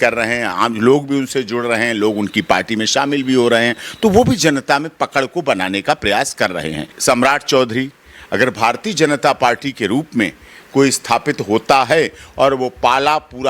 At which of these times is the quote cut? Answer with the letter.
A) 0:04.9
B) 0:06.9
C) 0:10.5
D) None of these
B